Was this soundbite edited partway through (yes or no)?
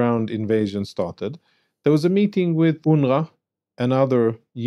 yes